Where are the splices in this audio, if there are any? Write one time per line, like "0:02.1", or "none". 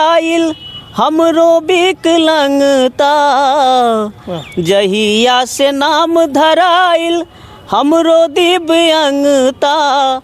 none